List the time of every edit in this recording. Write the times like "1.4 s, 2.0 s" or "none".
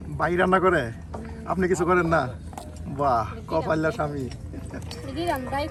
none